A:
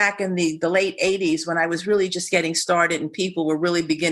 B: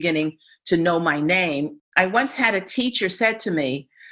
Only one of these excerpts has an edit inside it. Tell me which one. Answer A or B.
B